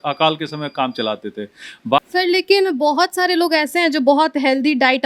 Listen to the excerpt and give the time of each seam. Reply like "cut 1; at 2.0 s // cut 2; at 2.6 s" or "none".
cut 1; at 2.0 s